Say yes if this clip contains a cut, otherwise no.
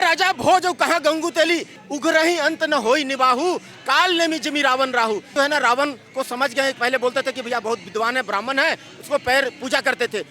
yes